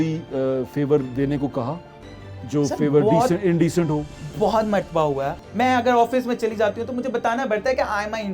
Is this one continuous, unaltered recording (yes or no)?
no